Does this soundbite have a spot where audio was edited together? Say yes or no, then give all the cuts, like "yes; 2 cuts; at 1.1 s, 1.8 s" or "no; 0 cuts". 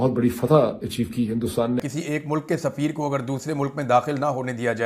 yes; 1 cut; at 1.9 s